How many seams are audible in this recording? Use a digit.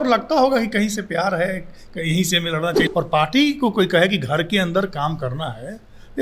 1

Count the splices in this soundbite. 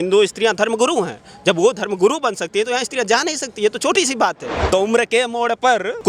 1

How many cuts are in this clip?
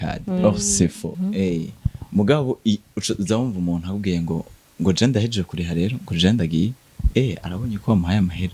1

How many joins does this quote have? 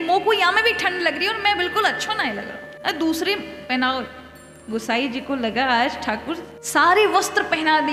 0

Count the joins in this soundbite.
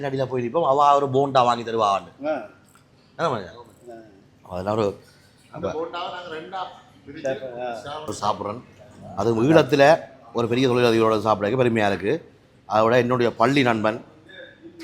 1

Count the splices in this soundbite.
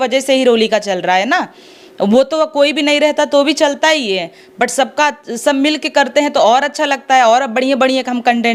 0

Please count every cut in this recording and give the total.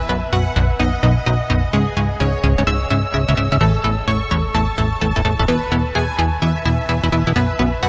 0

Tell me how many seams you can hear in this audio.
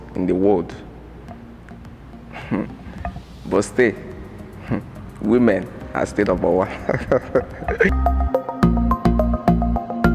1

